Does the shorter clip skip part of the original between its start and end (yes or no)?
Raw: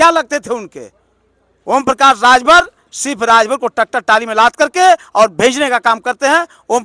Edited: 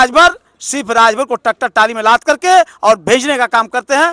no